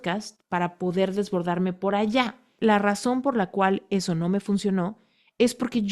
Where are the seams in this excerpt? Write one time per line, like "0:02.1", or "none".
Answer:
0:02.5